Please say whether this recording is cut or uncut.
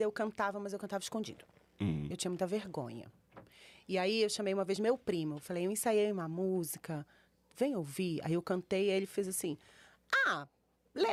uncut